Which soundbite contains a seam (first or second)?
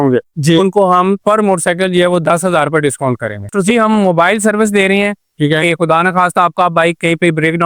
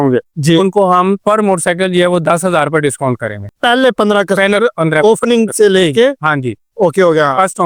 first